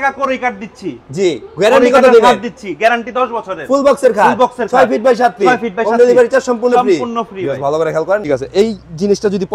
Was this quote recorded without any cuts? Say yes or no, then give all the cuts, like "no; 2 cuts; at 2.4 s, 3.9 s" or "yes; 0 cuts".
no; 1 cut; at 8.2 s